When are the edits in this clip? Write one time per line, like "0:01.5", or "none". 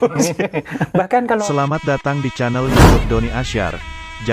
0:01.3

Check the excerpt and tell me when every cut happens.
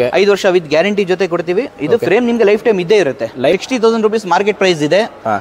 0:03.5

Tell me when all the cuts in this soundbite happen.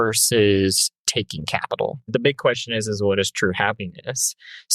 0:02.1

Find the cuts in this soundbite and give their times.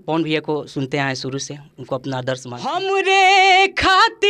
0:02.8

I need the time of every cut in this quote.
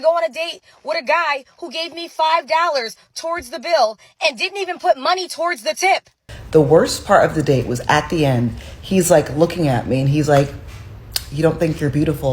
0:06.3

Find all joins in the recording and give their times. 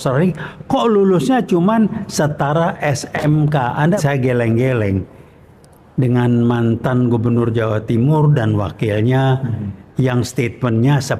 0:04.0

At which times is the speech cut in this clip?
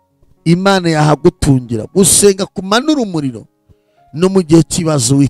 none

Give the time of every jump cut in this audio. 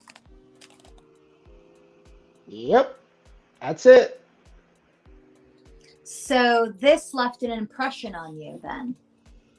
none

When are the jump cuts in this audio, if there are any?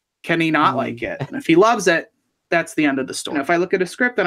0:01.3
0:03.3

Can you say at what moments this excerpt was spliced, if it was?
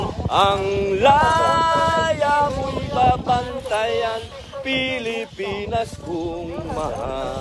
none

